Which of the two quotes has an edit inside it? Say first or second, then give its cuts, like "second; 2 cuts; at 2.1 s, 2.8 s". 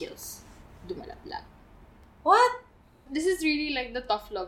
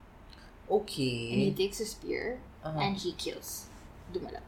first; 1 cut; at 3.0 s